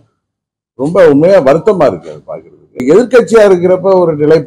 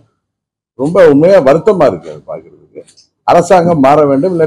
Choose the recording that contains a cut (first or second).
first